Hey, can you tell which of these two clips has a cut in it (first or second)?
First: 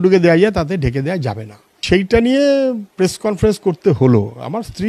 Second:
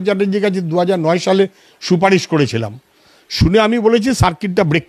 first